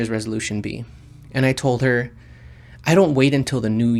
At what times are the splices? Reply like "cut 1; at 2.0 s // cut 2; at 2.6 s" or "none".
none